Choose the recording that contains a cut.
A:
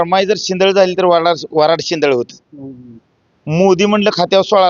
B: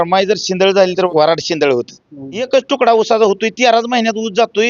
B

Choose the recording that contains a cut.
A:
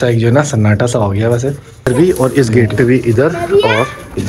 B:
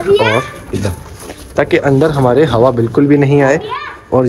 A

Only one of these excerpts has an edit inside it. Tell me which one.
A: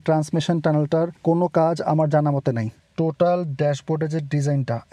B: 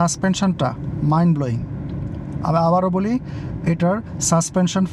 A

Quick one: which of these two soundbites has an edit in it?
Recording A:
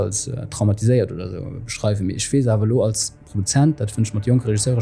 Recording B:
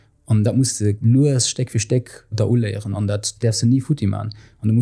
B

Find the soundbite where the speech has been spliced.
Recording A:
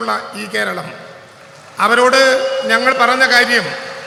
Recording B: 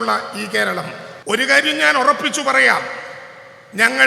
B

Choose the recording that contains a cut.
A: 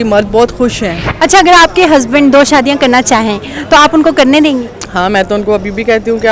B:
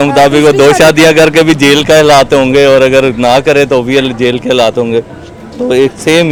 A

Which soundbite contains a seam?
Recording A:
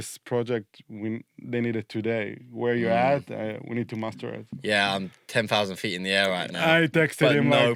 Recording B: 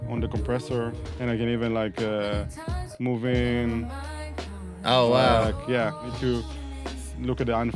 B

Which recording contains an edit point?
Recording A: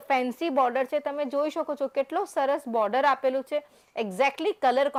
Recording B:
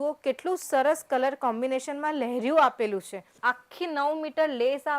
B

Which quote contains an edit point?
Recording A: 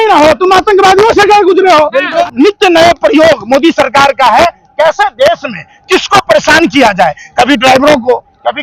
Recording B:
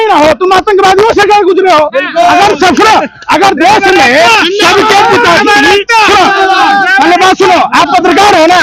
A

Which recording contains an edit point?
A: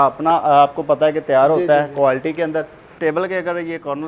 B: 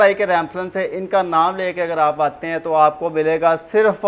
A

